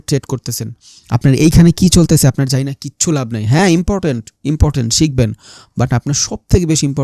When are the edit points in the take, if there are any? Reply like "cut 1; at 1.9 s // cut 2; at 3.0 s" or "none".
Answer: none